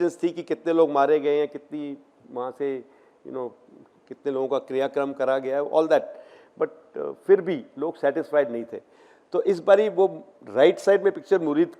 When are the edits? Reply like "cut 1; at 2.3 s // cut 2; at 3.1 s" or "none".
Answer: none